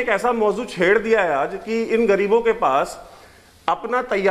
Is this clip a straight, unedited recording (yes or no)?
yes